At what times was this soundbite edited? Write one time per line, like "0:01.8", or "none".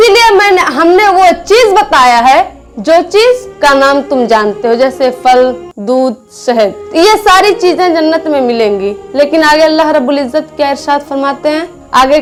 none